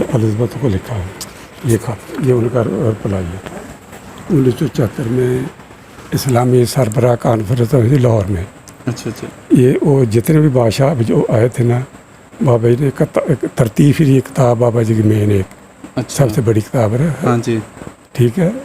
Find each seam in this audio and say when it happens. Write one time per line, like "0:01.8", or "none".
0:04.3